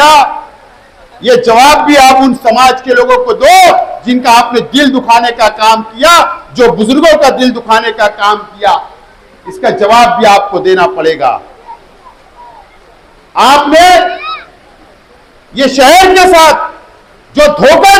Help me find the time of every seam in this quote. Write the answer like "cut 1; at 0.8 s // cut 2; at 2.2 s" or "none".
none

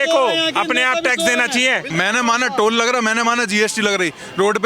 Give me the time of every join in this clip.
cut 1; at 1.9 s

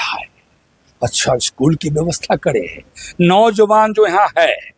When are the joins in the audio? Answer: none

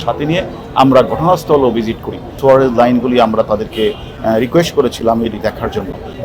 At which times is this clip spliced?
cut 1; at 2.3 s

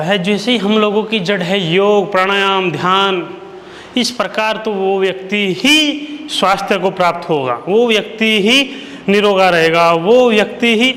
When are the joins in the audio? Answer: none

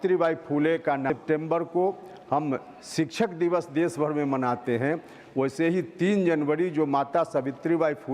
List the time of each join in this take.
cut 1; at 1.1 s

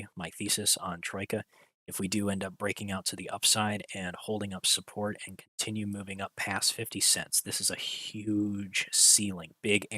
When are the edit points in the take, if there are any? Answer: none

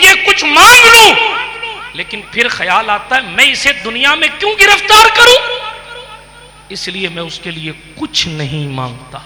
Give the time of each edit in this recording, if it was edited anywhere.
none

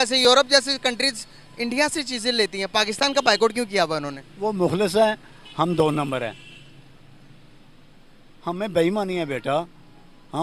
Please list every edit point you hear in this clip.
none

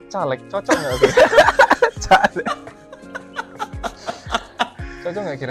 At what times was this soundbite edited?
none

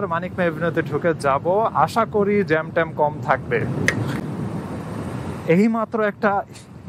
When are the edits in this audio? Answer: none

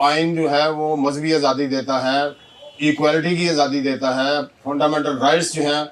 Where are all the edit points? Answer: none

